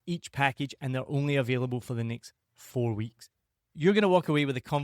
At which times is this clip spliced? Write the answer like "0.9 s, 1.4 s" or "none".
3.7 s